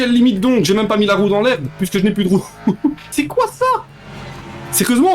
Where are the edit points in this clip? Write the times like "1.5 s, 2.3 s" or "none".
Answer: 3.1 s